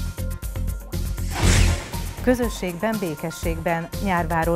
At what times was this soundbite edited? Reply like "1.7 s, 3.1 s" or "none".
2.1 s

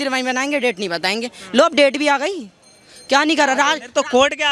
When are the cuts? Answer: none

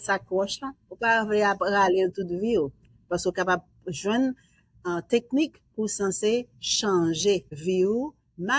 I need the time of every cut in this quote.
7.5 s

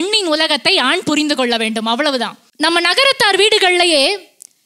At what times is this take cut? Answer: 2.4 s

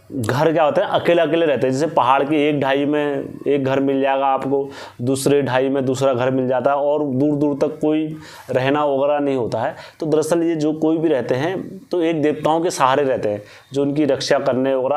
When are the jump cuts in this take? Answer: none

